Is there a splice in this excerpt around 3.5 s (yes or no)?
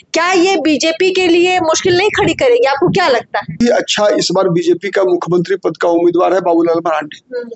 yes